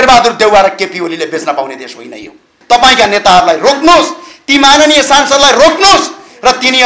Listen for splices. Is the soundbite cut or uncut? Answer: cut